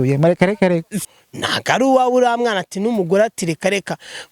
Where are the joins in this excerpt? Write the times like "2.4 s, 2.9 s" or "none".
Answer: 1.0 s